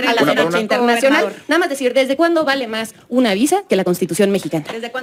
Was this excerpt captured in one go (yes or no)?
yes